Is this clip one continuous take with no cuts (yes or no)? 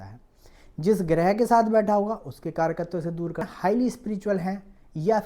no